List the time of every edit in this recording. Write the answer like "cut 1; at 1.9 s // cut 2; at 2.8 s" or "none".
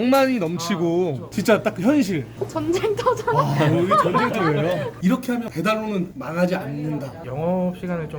cut 1; at 2.4 s // cut 2; at 4.9 s // cut 3; at 7.2 s